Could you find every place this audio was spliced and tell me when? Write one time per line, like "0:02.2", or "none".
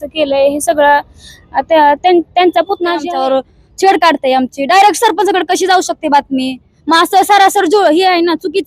0:03.0